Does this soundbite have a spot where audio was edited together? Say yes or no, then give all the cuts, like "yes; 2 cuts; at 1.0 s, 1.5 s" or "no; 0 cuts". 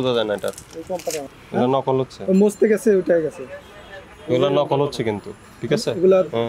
yes; 1 cut; at 1.4 s